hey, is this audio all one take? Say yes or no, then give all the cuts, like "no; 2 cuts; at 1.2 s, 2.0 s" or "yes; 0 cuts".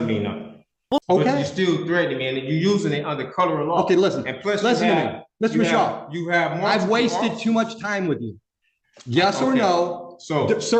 yes; 0 cuts